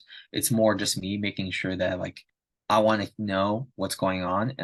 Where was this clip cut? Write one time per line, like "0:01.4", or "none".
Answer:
none